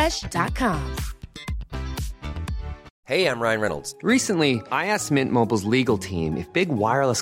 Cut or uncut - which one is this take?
cut